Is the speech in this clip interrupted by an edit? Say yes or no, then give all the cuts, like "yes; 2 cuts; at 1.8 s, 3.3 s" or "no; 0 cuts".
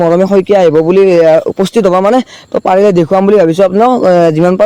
no; 0 cuts